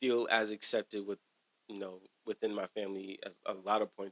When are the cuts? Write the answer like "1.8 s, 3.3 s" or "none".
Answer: none